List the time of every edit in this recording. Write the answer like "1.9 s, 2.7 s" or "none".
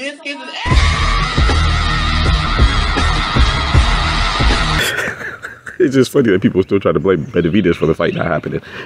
4.8 s